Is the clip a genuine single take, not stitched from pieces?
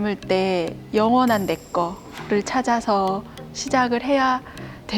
yes; 0 cuts

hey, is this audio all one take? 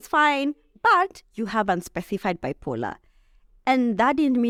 yes; 0 cuts

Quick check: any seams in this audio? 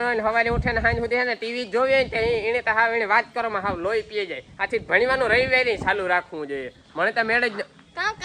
no; 0 cuts

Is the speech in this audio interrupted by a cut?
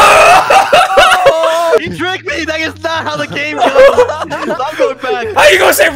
no; 0 cuts

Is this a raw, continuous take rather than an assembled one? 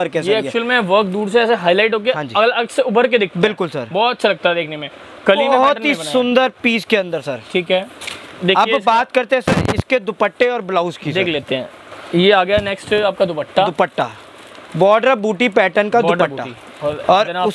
yes; 0 cuts

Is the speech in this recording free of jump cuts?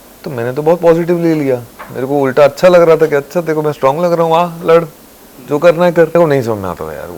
no; 1 cut; at 6.2 s

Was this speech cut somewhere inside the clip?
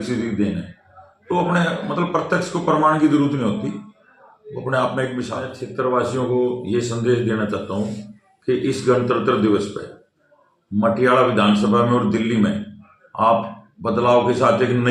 yes; 1 cut; at 5.3 s

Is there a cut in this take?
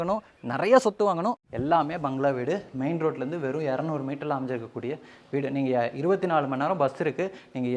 yes; 1 cut; at 1.4 s

